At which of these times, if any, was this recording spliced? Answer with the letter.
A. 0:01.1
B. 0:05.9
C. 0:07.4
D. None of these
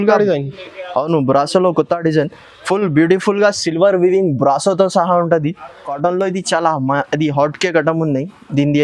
B